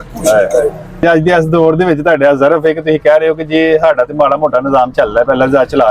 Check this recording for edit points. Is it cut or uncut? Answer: cut